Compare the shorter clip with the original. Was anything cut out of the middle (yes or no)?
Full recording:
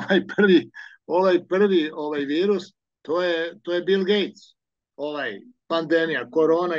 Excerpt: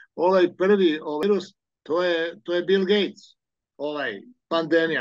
yes